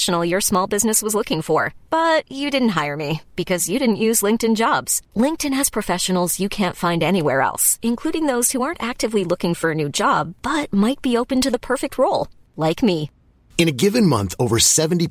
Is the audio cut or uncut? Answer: uncut